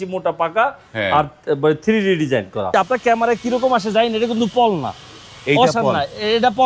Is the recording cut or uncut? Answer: cut